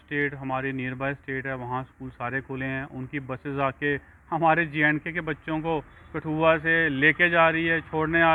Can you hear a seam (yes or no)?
no